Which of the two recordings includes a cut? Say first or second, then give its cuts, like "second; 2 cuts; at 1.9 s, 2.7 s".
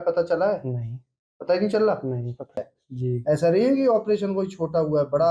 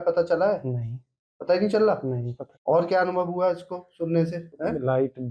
first; 1 cut; at 2.6 s